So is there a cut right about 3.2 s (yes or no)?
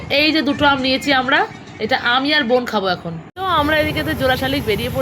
yes